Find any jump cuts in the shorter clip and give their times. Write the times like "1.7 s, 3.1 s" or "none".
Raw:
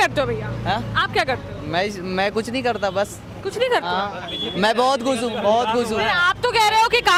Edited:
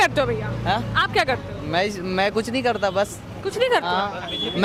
none